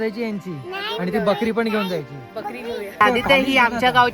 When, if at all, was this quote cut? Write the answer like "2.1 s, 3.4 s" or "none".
2.9 s